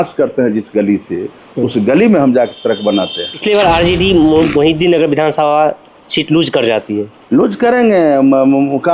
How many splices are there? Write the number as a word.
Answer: two